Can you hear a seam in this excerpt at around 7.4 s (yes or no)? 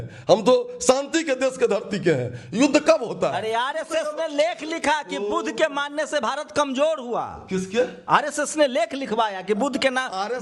no